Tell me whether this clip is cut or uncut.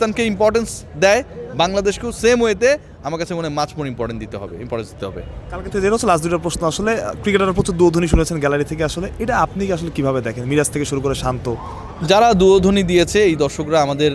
uncut